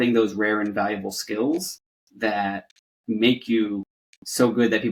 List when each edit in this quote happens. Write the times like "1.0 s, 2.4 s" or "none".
none